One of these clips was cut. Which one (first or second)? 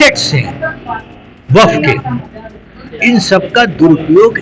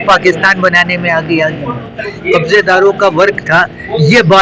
second